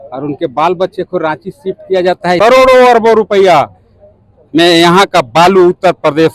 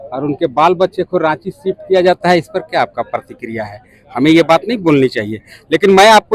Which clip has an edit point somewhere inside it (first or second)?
first